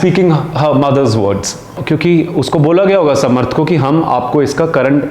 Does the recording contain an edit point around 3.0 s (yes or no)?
no